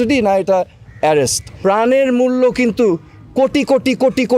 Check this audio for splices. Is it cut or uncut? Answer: cut